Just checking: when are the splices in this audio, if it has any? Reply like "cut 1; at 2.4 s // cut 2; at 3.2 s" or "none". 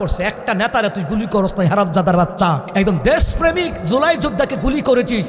cut 1; at 2.6 s